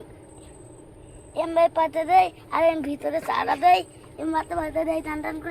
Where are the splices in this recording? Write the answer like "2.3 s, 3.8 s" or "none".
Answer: none